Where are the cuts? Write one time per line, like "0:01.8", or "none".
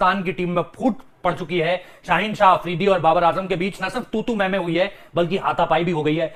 none